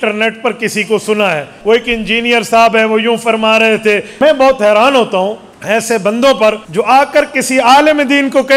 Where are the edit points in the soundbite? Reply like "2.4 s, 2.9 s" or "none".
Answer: 1.5 s, 4.1 s, 5.5 s, 6.6 s